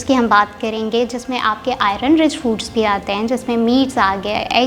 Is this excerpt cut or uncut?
uncut